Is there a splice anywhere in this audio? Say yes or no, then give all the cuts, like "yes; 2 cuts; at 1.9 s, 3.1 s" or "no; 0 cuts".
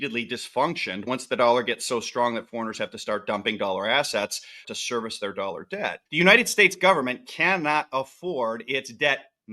yes; 3 cuts; at 1.1 s, 4.7 s, 6.0 s